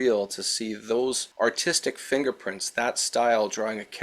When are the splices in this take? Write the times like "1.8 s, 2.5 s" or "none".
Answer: none